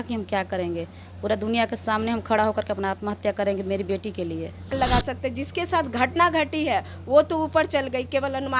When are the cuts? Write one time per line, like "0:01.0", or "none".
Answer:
0:04.7